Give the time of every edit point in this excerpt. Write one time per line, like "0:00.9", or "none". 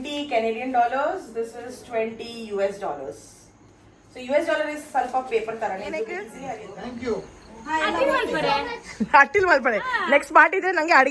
0:06.2

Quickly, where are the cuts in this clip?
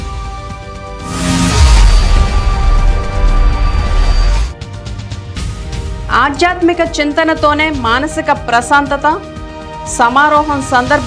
0:01.0

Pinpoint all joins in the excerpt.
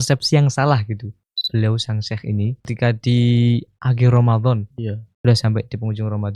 0:01.4
0:02.7

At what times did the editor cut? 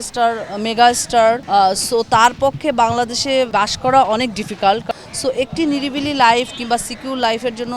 0:01.4
0:03.5
0:04.9

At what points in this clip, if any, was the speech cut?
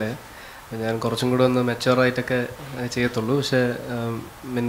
none

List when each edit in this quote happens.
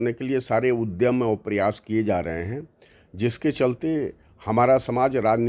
none

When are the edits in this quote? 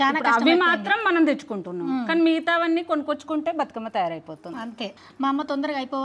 0:04.9

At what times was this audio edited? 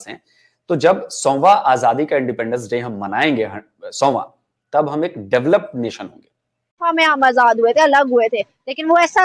0:06.8

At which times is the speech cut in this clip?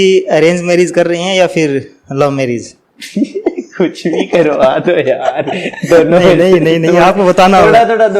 none

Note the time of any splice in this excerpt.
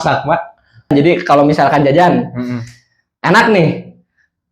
0:00.9

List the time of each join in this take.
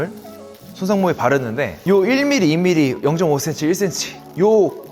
0:01.7

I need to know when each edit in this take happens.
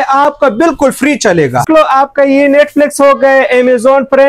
0:01.6

